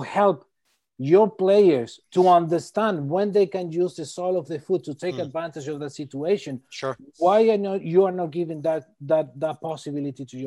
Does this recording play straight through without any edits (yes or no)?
yes